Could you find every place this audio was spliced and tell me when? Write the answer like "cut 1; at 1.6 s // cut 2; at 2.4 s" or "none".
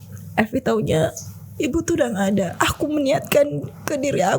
cut 1; at 2.5 s